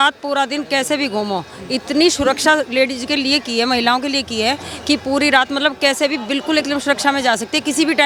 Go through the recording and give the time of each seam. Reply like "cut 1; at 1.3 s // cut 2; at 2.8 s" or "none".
none